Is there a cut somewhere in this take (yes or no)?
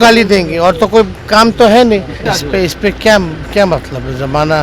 yes